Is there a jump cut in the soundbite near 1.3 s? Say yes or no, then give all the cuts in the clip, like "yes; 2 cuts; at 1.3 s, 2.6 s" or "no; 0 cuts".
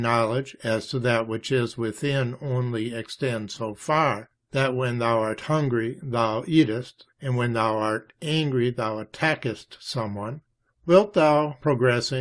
no; 1 cut; at 6.0 s